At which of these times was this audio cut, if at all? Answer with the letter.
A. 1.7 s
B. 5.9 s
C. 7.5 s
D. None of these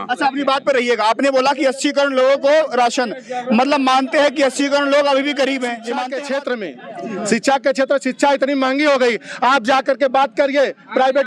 B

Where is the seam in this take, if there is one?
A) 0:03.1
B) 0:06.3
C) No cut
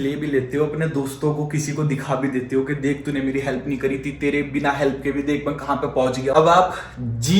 B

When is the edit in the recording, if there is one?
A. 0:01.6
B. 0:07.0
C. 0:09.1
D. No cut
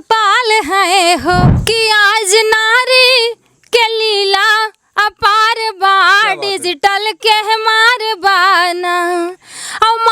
A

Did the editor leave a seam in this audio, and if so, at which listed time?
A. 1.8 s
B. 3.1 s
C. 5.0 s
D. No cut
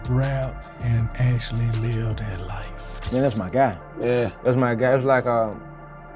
B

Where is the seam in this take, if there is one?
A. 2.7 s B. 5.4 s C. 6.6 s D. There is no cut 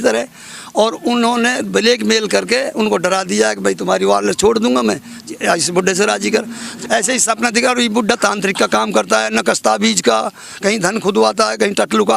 C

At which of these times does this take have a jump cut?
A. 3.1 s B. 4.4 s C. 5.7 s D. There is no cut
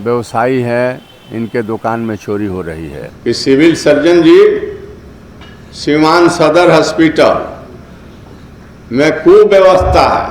A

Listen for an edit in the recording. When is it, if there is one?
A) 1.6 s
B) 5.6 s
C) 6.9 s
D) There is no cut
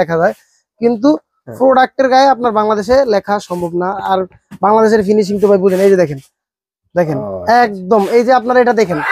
D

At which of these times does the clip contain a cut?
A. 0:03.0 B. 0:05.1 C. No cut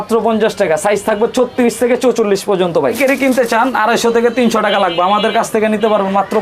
A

